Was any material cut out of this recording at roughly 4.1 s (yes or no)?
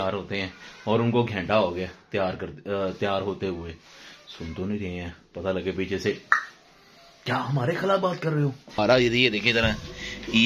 no